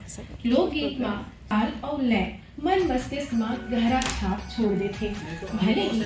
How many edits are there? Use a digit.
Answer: 0